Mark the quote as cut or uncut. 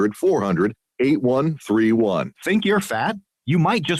cut